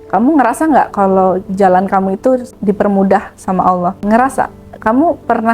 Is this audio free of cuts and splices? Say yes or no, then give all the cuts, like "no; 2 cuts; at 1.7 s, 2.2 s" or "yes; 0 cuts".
no; 2 cuts; at 2.5 s, 4.0 s